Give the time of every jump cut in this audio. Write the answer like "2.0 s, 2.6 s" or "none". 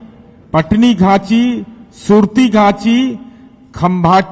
none